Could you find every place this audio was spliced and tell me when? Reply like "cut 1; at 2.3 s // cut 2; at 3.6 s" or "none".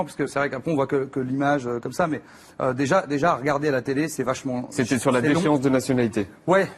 cut 1; at 1.1 s